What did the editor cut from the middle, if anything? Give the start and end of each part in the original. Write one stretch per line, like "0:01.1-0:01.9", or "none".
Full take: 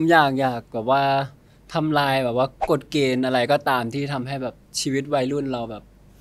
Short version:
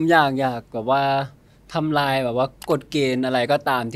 none